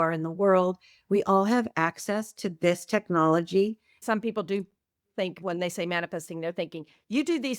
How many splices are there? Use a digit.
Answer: 1